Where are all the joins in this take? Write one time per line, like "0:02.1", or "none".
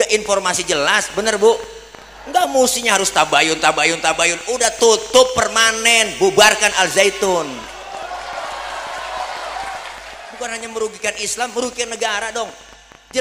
0:10.2